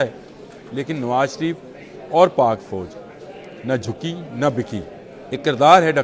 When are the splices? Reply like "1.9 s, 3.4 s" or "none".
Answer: 5.1 s